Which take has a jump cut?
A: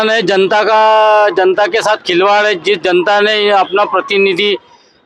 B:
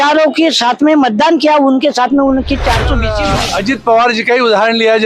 B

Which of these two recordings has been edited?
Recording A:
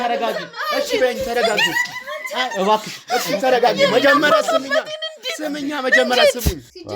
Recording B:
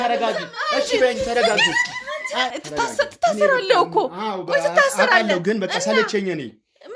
B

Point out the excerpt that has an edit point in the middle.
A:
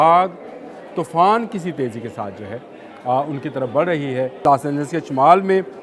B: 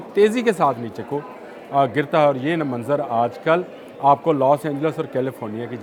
A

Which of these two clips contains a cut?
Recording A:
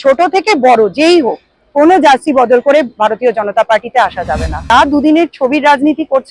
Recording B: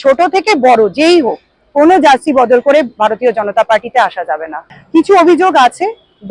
A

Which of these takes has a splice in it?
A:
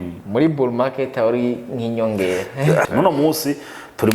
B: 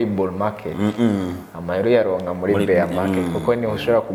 A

